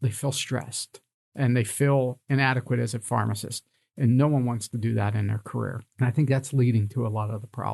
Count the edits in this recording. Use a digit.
1